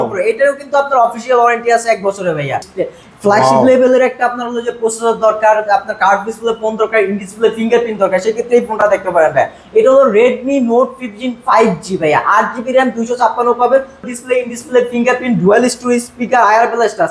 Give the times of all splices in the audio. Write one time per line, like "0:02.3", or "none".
0:02.7
0:14.0